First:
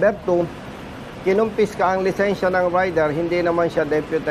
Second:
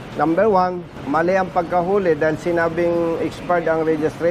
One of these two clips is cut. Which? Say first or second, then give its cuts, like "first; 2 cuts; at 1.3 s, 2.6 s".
second; 1 cut; at 0.9 s